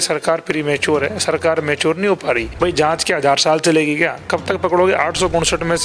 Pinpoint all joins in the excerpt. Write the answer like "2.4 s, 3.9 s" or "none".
2.5 s